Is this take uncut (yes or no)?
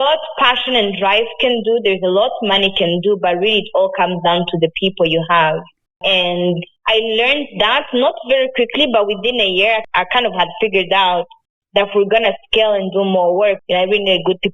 yes